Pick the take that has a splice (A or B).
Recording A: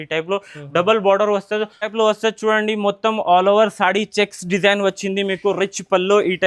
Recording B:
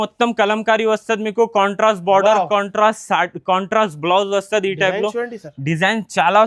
A